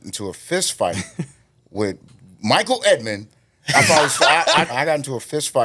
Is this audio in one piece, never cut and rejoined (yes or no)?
no